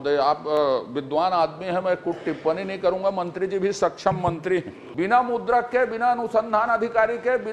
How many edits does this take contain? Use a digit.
1